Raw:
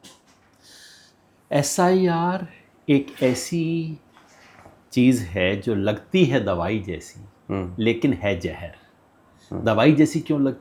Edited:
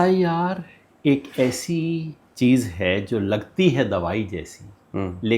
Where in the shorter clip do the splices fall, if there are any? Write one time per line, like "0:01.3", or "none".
0:02.2

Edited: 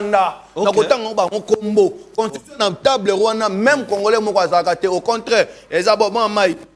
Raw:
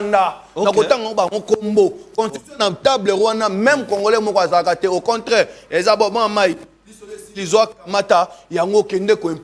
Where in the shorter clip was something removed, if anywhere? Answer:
none

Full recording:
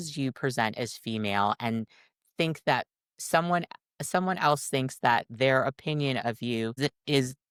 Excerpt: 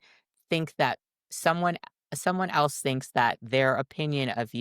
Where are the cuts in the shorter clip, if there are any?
none

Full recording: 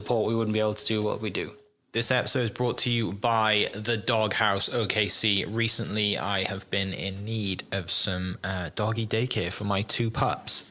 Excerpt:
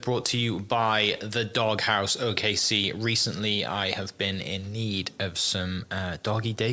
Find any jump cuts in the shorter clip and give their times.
none

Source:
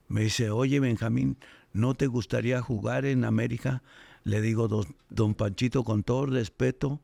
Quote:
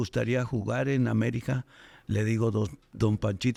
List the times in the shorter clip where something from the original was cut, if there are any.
none

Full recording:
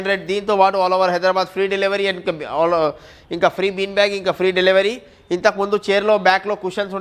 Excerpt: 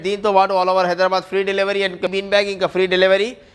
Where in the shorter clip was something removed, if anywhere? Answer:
0:02.1

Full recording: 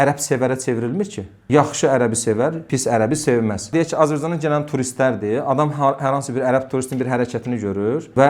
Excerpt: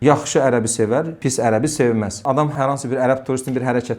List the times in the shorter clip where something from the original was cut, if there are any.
0:02.4

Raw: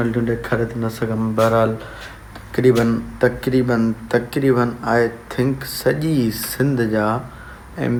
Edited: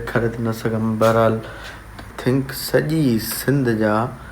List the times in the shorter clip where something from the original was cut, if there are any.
0:02.1

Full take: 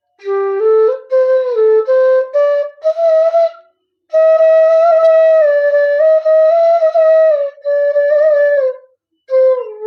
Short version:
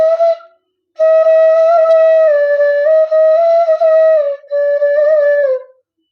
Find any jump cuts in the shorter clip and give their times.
none

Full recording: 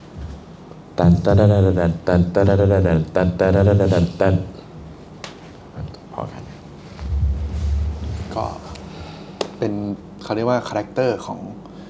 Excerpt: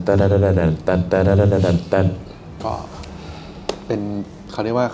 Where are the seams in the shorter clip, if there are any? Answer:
0:02.6

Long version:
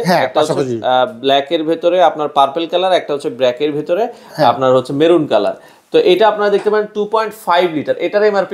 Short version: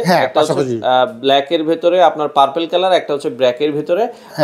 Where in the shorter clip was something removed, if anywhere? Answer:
none

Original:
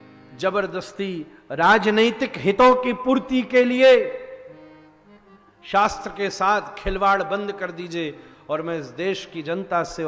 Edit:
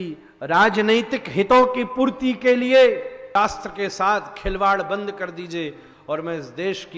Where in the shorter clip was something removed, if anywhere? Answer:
0:03.4

